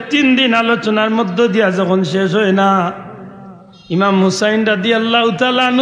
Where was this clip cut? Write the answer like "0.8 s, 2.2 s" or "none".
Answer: none